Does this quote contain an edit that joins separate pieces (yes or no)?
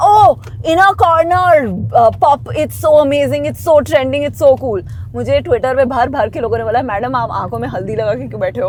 no